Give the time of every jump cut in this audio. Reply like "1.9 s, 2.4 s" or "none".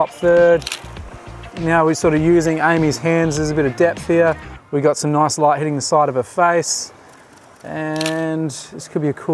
1.6 s